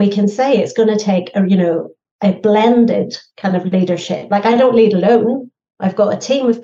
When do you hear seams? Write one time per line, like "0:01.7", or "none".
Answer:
none